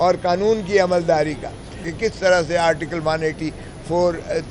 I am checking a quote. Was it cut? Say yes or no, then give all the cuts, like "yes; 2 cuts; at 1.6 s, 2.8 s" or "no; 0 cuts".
yes; 1 cut; at 1.9 s